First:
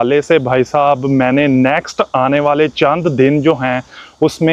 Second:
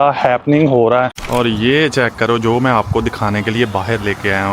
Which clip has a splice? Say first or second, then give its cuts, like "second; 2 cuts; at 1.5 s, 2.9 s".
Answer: second; 1 cut; at 1.2 s